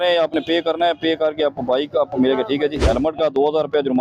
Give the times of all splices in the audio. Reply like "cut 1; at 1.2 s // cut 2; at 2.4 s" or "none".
cut 1; at 2.8 s